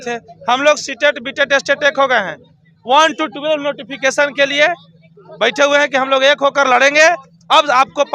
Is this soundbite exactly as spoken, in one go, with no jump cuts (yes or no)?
yes